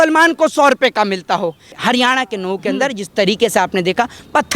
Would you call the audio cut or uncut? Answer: cut